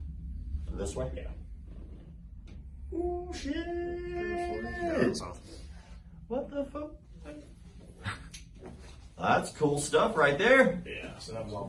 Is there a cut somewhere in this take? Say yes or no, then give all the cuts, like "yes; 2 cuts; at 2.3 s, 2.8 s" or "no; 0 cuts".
no; 0 cuts